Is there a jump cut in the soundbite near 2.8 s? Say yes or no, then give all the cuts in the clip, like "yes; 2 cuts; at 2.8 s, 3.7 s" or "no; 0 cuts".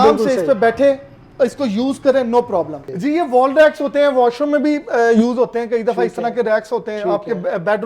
yes; 1 cut; at 2.8 s